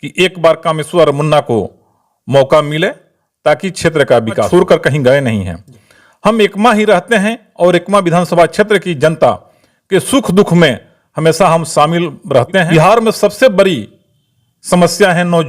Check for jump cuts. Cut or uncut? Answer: cut